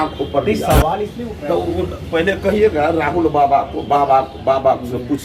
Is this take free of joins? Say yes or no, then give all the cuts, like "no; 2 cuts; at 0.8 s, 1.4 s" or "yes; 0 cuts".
no; 1 cut; at 1.2 s